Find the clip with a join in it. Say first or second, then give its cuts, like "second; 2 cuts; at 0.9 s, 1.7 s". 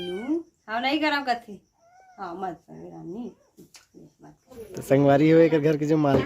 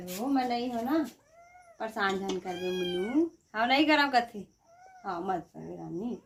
first; 1 cut; at 4.6 s